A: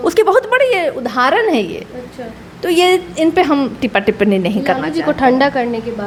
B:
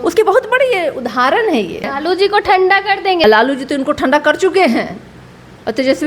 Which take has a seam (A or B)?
B